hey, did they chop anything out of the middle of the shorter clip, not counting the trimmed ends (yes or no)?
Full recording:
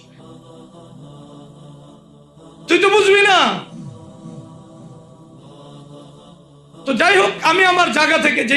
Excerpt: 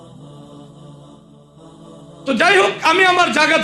yes